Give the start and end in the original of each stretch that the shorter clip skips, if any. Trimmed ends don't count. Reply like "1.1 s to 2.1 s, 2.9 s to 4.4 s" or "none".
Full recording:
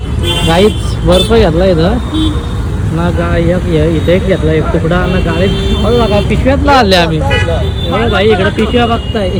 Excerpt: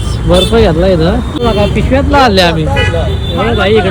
2.2 s to 5.9 s